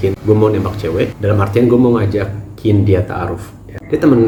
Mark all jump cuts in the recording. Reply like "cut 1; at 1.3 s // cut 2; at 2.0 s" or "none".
none